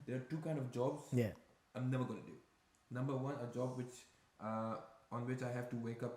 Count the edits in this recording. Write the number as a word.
zero